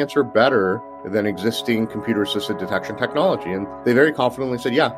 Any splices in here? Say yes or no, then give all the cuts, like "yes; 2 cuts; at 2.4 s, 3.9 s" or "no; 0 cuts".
yes; 1 cut; at 3.7 s